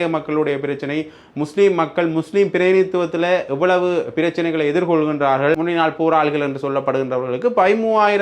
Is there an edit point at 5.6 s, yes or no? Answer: yes